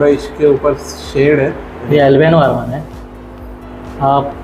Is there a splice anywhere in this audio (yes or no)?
yes